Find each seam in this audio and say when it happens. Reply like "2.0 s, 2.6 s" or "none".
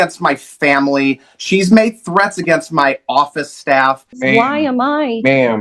4.2 s